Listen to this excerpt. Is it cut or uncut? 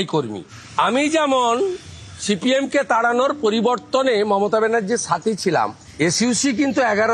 uncut